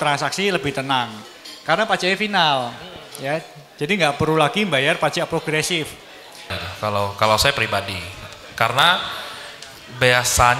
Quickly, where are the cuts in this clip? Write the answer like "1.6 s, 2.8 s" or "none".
6.6 s